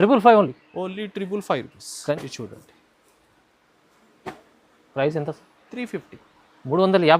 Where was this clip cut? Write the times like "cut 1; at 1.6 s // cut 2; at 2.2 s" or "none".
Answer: cut 1; at 2.1 s